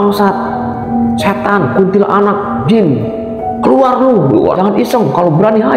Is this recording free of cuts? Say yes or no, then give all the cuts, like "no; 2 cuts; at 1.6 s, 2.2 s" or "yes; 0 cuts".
no; 1 cut; at 4.6 s